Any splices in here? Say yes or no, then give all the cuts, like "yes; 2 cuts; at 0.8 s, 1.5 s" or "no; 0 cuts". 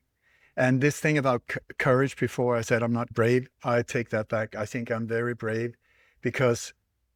no; 0 cuts